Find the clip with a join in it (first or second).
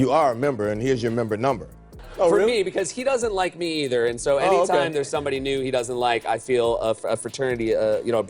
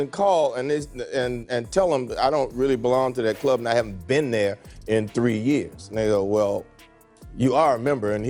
first